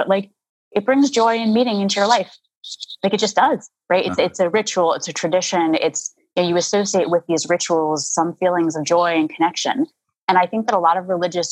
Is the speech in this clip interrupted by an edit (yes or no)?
no